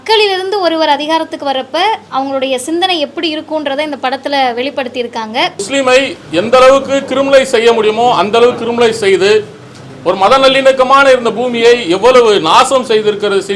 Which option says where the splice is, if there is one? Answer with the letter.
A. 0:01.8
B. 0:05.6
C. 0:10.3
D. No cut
B